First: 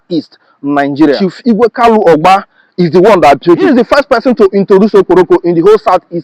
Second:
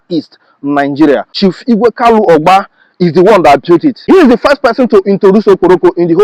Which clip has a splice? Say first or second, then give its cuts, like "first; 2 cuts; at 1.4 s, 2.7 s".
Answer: first; 2 cuts; at 1.2 s, 3.7 s